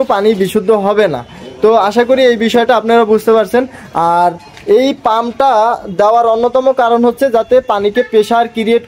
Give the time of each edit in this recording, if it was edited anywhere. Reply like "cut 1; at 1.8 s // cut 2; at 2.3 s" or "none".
none